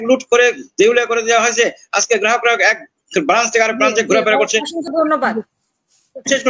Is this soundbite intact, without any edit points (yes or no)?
yes